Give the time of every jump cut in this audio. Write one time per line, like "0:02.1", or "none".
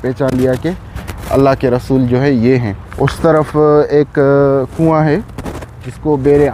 0:02.8